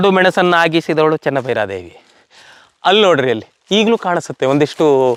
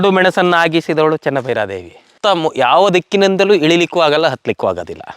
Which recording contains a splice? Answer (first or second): second